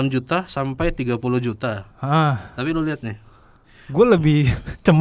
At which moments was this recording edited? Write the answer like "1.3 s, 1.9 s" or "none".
none